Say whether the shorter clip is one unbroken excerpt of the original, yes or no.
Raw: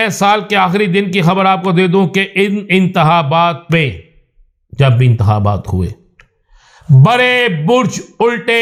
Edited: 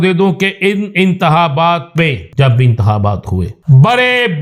no